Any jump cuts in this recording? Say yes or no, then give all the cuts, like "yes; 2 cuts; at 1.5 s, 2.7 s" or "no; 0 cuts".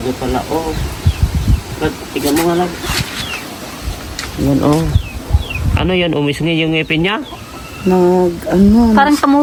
no; 0 cuts